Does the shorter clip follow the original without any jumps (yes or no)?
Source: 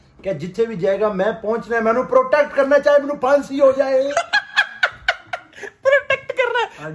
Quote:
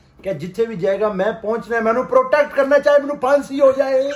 yes